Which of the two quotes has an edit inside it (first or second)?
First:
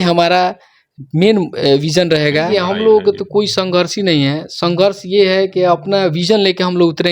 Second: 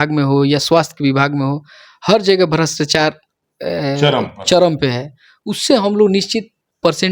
first